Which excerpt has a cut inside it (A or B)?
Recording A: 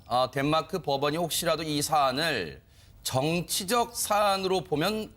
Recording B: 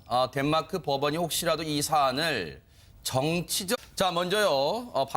A